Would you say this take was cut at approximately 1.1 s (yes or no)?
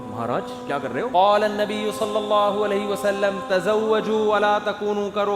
yes